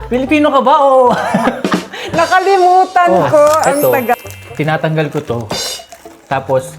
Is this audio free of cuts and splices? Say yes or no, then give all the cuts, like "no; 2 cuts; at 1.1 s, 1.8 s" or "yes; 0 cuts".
no; 1 cut; at 3.9 s